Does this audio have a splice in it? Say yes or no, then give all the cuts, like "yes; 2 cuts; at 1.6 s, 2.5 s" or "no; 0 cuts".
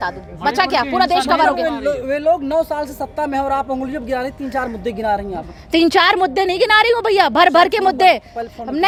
no; 0 cuts